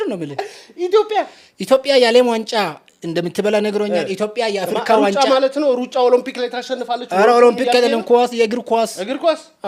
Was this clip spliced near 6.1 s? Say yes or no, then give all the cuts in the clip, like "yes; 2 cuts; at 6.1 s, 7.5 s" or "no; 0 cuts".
no; 0 cuts